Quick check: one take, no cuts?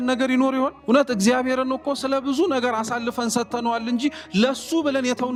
yes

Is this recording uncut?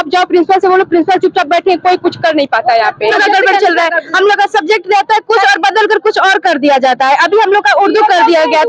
no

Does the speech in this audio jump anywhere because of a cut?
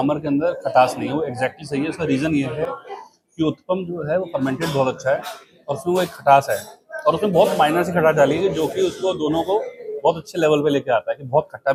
no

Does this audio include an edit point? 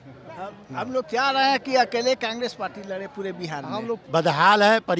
yes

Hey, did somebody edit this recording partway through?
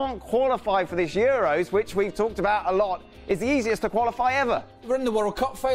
yes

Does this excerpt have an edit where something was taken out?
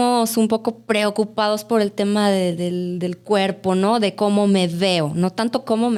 no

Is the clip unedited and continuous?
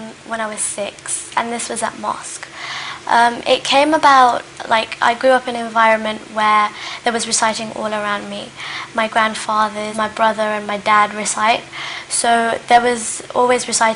yes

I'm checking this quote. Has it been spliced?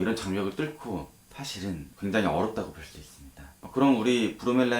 yes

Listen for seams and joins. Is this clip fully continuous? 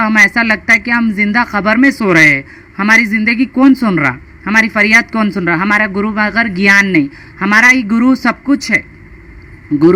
yes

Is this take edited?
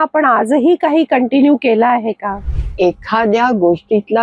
yes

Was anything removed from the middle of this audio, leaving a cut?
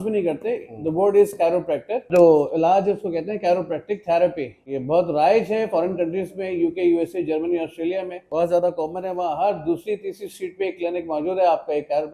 yes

